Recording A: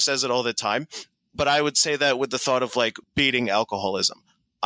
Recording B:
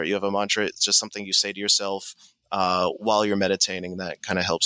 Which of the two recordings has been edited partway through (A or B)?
A